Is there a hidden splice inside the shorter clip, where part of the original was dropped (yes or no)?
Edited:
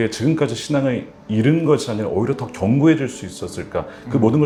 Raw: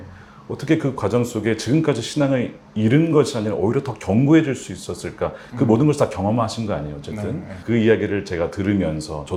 no